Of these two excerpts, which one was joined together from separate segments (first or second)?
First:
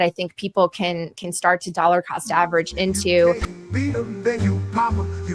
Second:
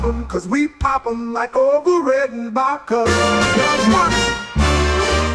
first